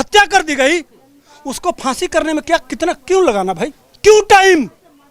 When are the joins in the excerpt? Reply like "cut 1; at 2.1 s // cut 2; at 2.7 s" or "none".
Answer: cut 1; at 3.8 s